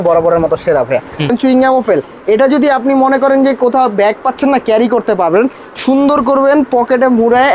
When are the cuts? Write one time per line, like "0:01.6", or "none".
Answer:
0:01.3